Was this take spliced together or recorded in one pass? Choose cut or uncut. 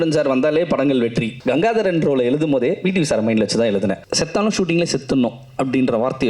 cut